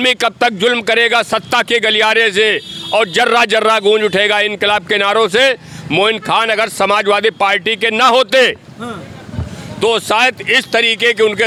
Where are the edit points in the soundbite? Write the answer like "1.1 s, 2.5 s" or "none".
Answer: none